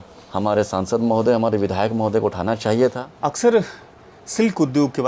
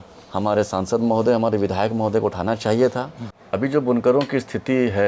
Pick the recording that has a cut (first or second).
first